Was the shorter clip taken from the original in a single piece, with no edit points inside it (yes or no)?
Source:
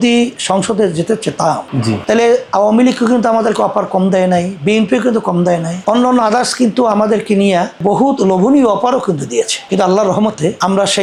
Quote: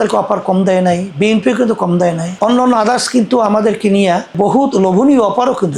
yes